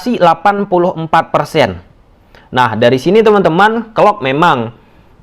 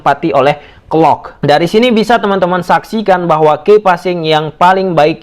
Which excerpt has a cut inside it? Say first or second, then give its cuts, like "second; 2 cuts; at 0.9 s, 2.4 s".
second; 1 cut; at 1.3 s